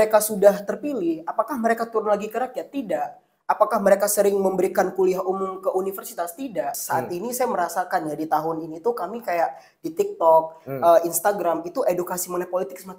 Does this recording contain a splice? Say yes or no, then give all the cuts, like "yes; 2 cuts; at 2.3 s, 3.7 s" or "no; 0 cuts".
yes; 1 cut; at 6.8 s